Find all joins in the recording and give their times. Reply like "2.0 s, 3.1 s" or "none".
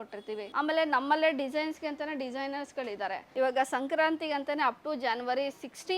3.2 s